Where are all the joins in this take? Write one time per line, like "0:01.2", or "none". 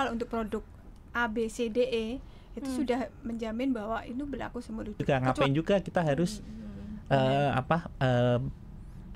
0:05.0